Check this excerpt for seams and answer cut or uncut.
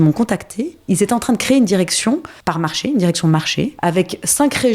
cut